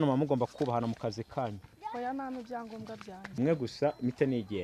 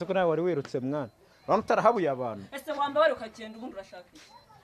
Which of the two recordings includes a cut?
first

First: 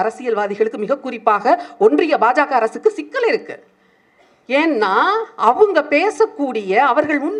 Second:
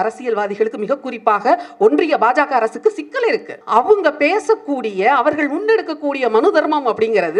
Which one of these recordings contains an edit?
second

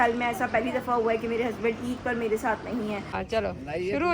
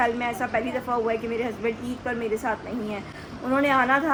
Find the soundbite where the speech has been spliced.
first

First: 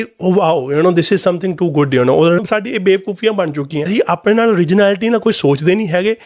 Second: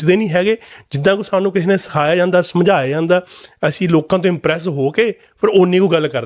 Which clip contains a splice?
first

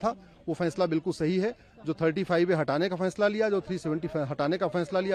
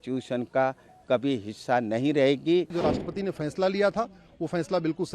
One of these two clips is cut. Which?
second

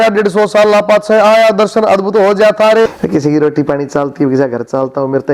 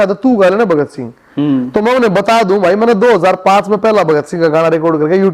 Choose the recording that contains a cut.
first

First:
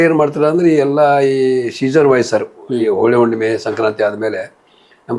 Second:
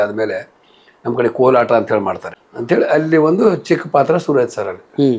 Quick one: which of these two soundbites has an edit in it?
second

